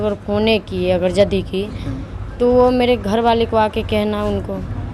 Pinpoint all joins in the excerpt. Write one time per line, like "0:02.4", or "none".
none